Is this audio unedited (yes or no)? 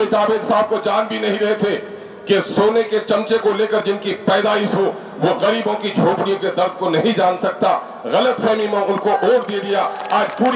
yes